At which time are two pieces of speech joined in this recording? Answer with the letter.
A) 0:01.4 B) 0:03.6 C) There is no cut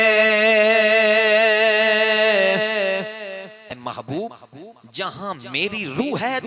B